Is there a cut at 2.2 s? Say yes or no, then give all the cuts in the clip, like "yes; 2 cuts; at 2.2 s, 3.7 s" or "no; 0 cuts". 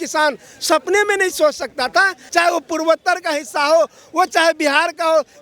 yes; 1 cut; at 2.2 s